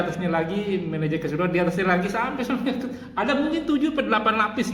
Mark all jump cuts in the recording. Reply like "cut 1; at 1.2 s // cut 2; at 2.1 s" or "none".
none